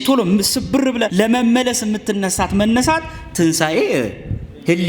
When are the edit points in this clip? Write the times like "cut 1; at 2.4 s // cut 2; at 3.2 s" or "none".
cut 1; at 1.1 s

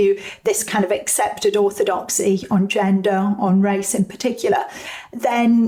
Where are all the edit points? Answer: none

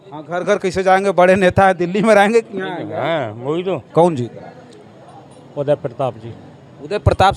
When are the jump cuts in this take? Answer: cut 1; at 3.9 s

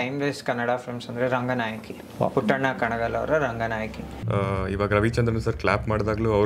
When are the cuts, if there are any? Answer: cut 1; at 4.1 s

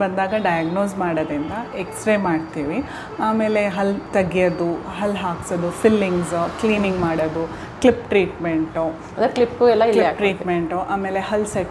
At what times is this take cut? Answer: none

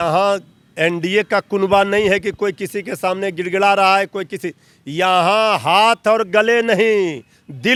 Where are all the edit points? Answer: none

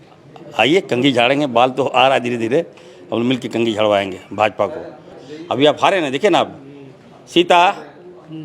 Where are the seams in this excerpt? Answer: cut 1; at 5.2 s

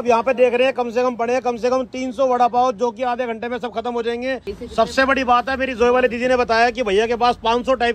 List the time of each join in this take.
cut 1; at 4.5 s

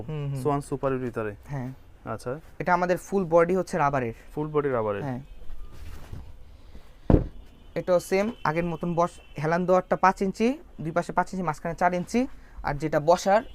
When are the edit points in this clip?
none

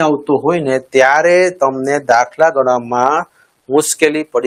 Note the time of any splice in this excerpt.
none

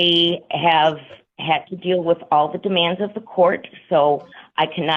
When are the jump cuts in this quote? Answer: none

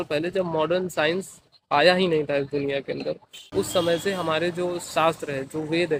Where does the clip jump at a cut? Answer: none

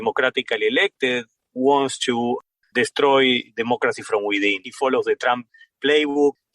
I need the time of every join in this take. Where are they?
cut 1; at 2.5 s // cut 2; at 4.7 s

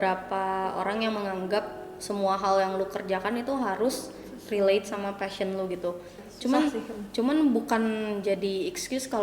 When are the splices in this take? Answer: cut 1; at 6.2 s

